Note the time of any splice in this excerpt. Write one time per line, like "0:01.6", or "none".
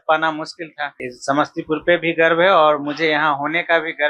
0:01.1